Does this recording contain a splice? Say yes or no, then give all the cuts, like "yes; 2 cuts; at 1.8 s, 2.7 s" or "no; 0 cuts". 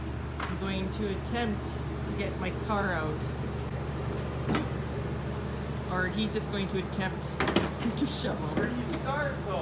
no; 0 cuts